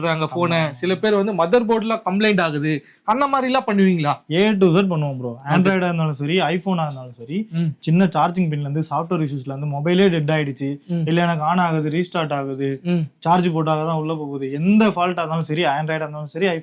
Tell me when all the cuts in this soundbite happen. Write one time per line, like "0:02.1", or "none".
none